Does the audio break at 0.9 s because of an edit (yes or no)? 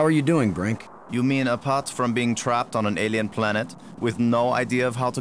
yes